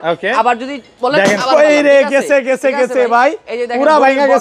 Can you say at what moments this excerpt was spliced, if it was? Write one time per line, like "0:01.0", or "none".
none